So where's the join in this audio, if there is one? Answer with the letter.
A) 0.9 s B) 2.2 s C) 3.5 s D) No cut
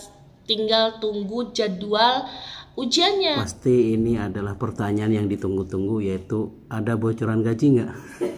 C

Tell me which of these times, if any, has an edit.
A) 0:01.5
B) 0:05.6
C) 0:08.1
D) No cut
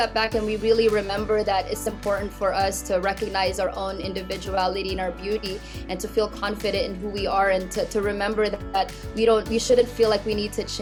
D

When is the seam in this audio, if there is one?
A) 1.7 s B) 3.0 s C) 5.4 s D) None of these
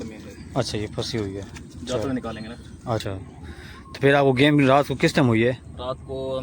B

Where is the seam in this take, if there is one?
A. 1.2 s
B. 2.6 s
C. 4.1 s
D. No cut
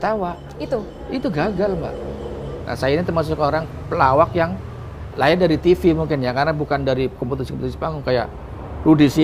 B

